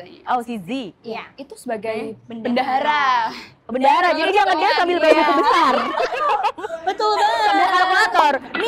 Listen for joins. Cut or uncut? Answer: uncut